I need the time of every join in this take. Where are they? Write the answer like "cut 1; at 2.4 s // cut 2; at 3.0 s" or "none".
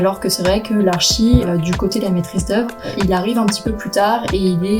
cut 1; at 1.5 s // cut 2; at 2.9 s